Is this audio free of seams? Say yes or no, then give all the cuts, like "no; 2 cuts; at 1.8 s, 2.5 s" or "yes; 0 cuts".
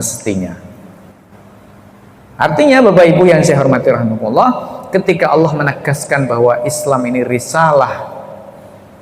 no; 1 cut; at 1.3 s